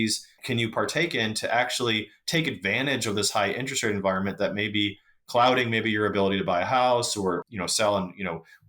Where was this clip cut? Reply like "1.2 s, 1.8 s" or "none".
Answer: 7.4 s